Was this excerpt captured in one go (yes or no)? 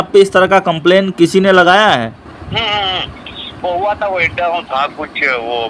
no